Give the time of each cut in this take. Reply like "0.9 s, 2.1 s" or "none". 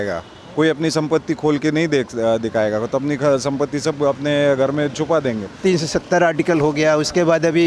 5.6 s